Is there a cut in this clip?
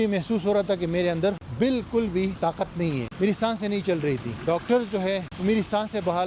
yes; 4 cuts; at 1.4 s, 2.7 s, 4.3 s, 5.3 s

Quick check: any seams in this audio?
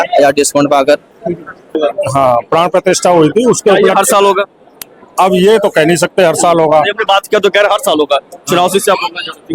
yes; 1 cut; at 1.8 s

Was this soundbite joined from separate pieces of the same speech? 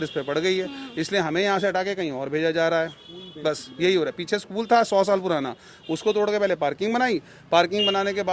no; 0 cuts

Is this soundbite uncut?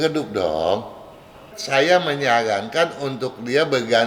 no; 1 cut; at 1.5 s

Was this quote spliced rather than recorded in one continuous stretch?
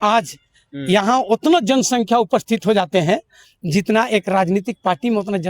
no; 0 cuts

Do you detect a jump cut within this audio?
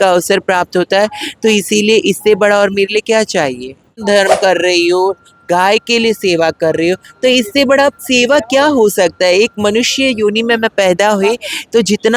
yes; 1 cut; at 4.0 s

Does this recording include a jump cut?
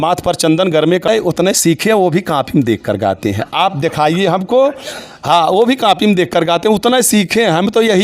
yes; 1 cut; at 1.1 s

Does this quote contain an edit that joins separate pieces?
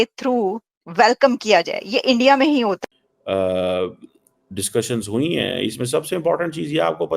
yes; 1 cut; at 2.8 s

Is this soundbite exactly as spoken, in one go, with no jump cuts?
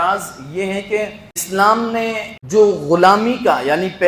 no; 2 cuts; at 1.4 s, 2.3 s

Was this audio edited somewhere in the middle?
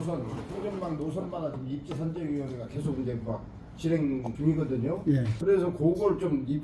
no; 0 cuts

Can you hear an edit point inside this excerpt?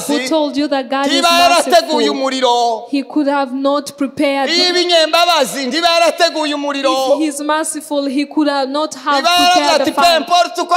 no; 0 cuts

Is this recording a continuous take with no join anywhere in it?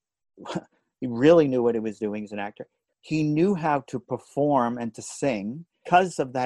no; 1 cut; at 2.7 s

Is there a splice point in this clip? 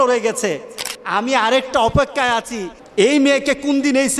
no; 0 cuts

